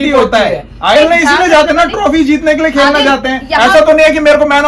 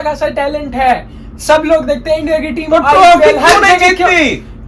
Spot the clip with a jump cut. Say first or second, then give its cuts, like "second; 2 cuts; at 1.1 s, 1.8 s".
first; 1 cut; at 0.9 s